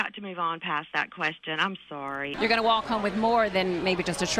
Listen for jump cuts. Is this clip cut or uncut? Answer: cut